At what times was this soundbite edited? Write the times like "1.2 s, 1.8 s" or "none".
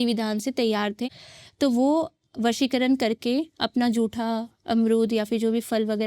1.0 s